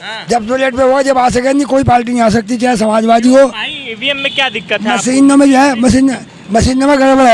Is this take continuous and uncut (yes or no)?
yes